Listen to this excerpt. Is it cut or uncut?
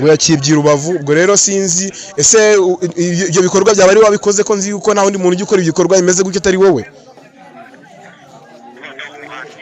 uncut